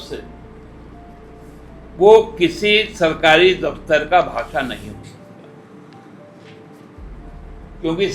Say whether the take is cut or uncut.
uncut